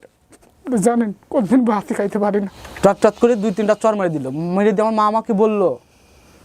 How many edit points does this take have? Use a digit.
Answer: 1